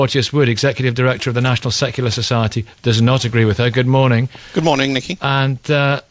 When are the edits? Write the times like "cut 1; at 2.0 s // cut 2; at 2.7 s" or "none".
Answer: none